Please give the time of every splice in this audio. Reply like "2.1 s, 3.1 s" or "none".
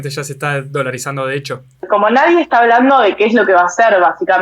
1.9 s